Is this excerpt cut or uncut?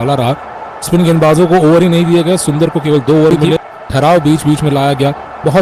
cut